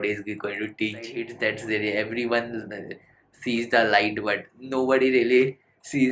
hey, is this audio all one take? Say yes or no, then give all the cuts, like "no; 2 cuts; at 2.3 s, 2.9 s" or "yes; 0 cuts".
no; 1 cut; at 1.3 s